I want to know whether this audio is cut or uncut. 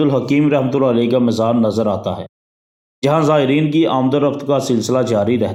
uncut